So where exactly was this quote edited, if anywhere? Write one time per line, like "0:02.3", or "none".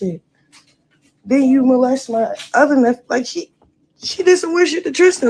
0:01.9